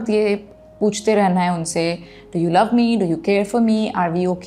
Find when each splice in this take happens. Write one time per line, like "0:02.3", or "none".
none